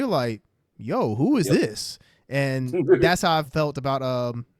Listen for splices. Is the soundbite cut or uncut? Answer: cut